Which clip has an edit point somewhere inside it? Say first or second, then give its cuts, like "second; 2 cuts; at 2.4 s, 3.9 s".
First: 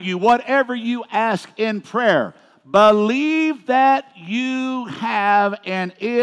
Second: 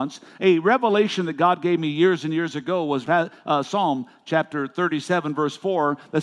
second; 1 cut; at 3.0 s